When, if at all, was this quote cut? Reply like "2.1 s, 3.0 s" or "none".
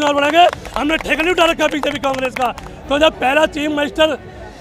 2.7 s